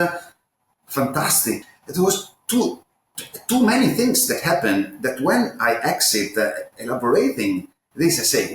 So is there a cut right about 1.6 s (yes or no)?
yes